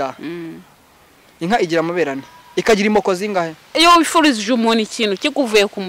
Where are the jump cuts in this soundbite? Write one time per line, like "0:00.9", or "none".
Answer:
0:03.8